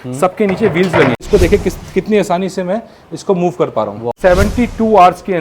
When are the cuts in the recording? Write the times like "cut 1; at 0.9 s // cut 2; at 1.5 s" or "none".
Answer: cut 1; at 1.2 s // cut 2; at 4.1 s

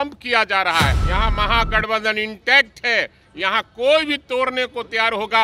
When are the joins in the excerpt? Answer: cut 1; at 1.0 s

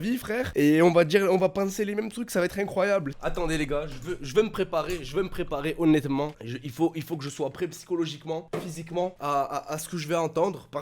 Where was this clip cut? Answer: cut 1; at 3.1 s

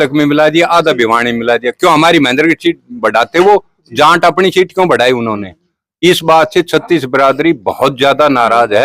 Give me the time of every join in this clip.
none

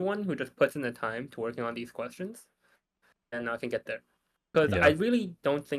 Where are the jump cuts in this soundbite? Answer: none

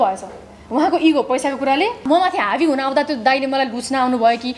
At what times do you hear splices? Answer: cut 1; at 2.0 s

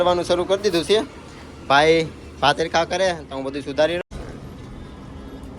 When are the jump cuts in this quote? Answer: cut 1; at 4.0 s

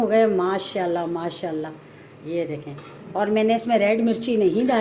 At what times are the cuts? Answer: none

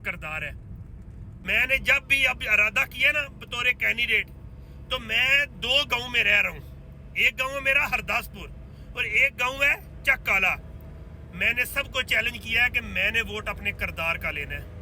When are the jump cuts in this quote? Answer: cut 1; at 1.4 s

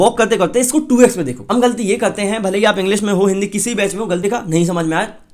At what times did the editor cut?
cut 1; at 1.4 s // cut 2; at 4.2 s

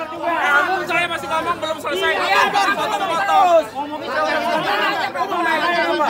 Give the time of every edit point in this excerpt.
none

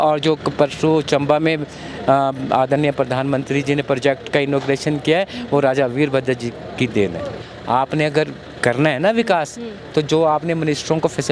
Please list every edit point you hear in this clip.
cut 1; at 7.5 s

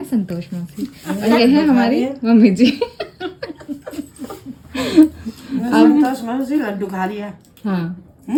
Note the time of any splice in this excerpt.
none

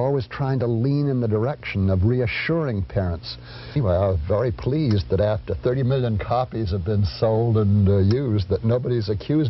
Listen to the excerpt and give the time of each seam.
cut 1; at 3.8 s

